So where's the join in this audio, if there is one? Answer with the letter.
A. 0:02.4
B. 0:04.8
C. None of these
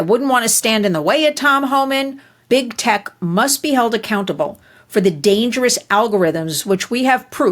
A